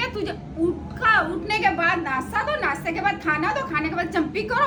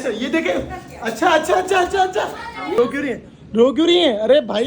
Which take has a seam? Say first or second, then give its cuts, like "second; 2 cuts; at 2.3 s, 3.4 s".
second; 1 cut; at 2.8 s